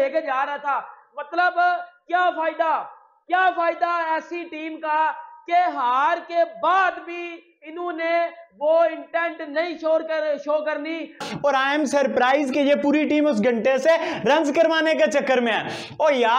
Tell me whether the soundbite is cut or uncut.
cut